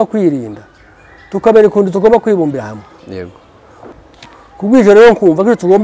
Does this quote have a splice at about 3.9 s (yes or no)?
yes